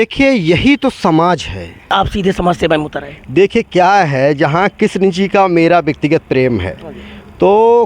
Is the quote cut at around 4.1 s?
no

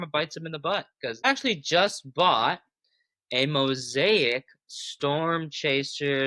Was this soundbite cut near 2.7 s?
no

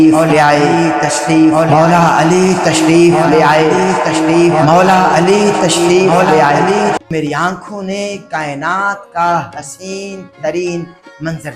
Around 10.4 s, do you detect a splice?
no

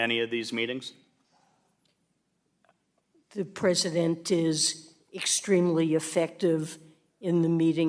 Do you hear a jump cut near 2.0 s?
no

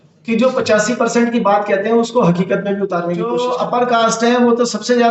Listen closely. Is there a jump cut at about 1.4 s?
no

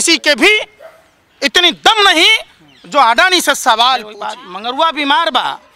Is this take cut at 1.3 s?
no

